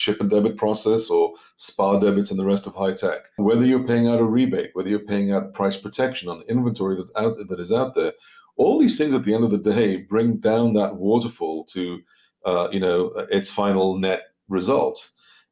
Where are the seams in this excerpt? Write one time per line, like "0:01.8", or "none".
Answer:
none